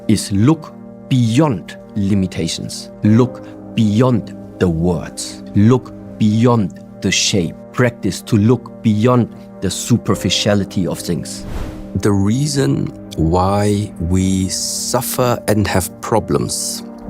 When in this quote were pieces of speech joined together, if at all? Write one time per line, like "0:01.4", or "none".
0:11.6